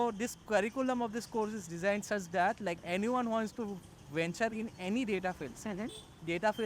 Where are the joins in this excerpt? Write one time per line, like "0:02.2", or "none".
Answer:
0:02.8

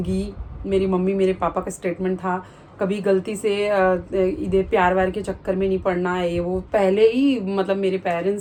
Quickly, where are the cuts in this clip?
none

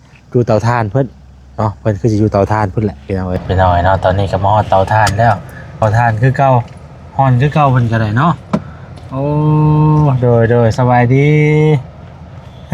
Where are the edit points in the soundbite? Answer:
0:03.4
0:05.8

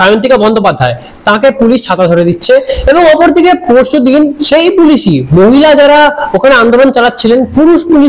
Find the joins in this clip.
none

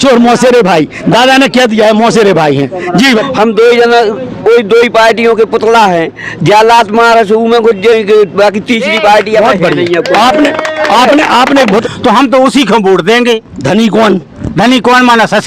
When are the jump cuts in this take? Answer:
0:03.2
0:11.8

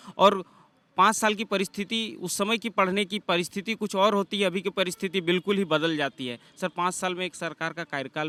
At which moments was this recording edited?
none

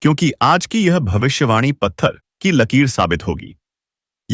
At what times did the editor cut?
0:02.3

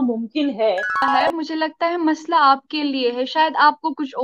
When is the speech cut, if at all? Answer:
0:01.1

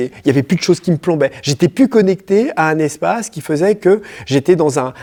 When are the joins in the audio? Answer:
none

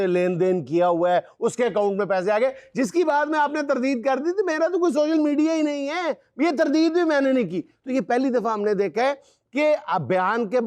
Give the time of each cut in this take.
none

